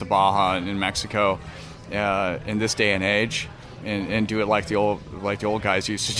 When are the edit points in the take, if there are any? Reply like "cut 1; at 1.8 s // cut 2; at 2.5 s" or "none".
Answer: cut 1; at 3.8 s

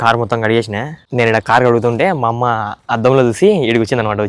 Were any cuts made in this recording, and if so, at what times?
cut 1; at 1.0 s

